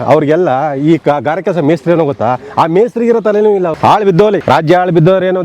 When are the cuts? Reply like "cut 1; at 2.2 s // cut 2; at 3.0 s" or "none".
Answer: cut 1; at 3.8 s // cut 2; at 4.4 s